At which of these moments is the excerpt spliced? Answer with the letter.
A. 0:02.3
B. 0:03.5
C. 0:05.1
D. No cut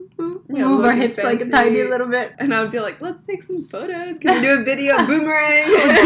A